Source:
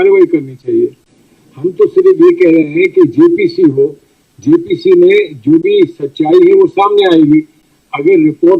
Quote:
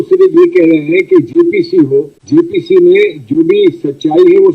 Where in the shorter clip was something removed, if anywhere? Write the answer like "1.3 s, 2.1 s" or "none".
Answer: 2.2 s

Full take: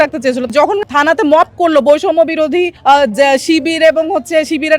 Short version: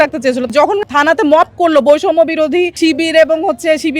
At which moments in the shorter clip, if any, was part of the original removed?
2.8 s

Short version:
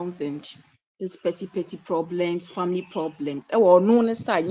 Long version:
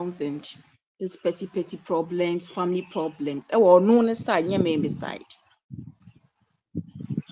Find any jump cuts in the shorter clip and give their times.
none

